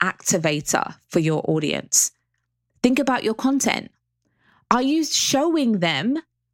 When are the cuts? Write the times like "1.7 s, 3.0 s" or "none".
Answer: 1.0 s